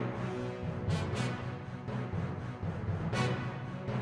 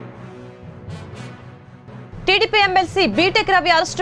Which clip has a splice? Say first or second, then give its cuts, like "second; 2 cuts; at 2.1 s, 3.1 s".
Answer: first; 1 cut; at 2.0 s